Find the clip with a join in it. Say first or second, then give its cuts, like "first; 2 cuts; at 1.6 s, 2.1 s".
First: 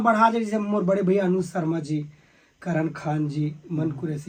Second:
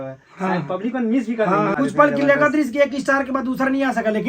second; 1 cut; at 1.8 s